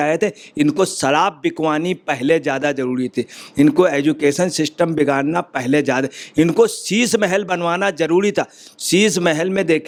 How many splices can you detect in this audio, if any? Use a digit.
0